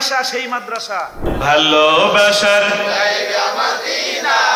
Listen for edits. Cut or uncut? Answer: cut